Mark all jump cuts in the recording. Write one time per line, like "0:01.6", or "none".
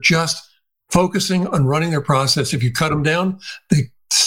none